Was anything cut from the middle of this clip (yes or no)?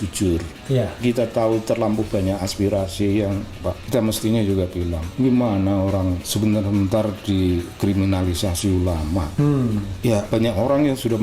yes